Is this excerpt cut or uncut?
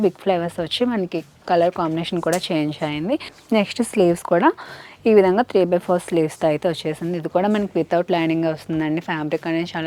cut